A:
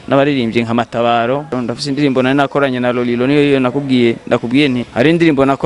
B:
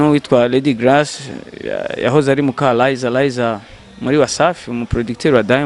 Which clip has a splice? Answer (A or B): A